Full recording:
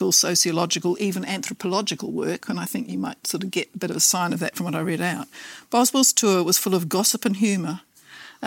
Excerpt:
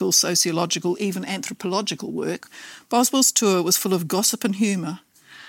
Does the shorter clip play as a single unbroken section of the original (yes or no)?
no